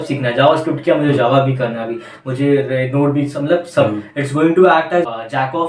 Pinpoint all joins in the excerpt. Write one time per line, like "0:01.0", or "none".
none